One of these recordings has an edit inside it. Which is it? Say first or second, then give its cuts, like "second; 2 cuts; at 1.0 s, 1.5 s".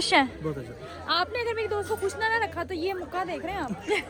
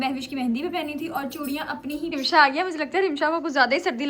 second; 1 cut; at 2.1 s